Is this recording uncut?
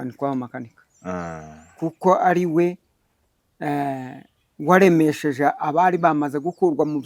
yes; 0 cuts

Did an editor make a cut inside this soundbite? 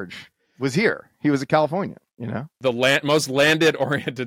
yes; 1 cut; at 2.5 s

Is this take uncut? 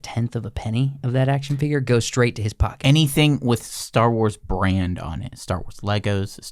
yes; 0 cuts

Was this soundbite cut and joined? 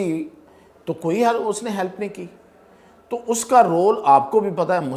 no; 0 cuts

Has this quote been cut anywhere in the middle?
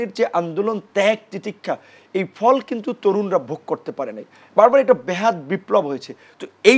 no; 0 cuts

